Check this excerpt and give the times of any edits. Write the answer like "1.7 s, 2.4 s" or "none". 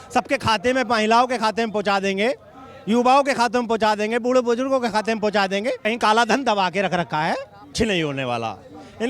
5.8 s, 7.7 s